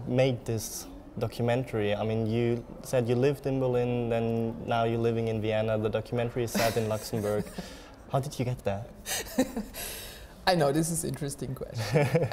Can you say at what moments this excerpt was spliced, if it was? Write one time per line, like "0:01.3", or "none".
none